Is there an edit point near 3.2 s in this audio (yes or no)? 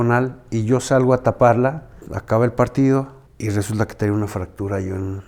yes